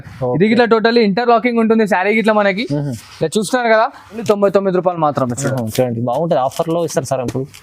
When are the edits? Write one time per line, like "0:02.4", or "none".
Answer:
0:04.2